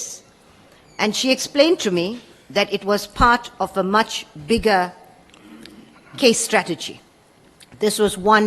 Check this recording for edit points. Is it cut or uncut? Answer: uncut